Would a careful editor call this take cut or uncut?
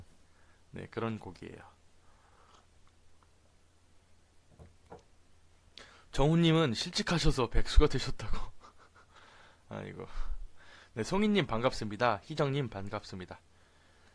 cut